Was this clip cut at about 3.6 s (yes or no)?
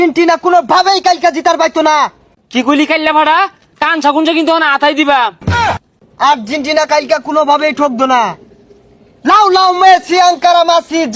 no